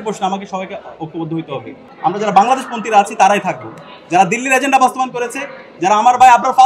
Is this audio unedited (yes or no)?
no